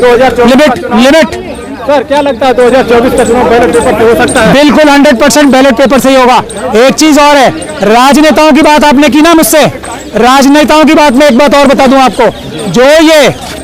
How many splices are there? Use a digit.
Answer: 0